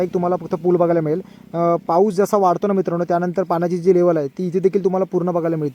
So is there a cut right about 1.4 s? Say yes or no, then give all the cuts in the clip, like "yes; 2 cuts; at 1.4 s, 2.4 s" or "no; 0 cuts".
no; 0 cuts